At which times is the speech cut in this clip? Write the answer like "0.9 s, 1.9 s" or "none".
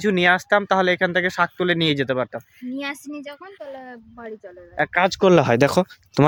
none